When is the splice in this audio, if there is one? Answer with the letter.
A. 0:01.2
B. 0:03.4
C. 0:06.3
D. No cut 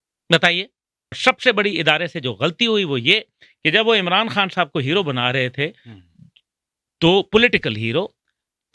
A